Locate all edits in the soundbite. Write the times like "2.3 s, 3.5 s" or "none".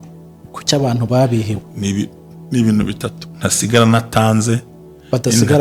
none